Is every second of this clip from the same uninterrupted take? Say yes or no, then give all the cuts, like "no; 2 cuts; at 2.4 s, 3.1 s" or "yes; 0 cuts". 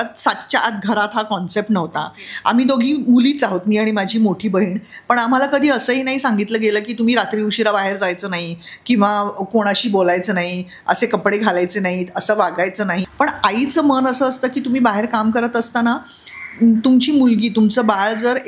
no; 1 cut; at 13.1 s